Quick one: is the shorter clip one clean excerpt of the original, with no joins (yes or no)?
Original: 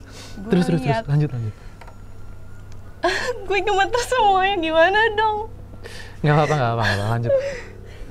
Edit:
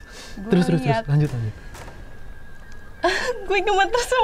yes